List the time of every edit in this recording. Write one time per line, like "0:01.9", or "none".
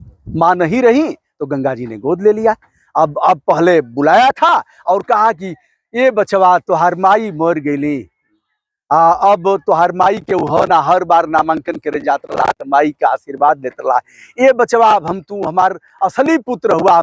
none